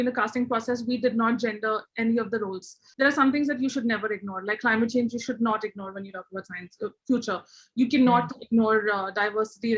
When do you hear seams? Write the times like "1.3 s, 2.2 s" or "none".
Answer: 2.8 s